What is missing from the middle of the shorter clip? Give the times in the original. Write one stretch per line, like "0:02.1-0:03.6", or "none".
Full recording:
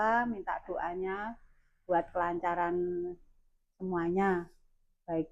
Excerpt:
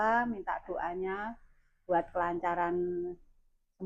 none